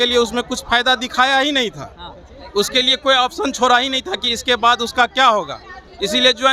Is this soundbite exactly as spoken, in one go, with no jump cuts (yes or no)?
yes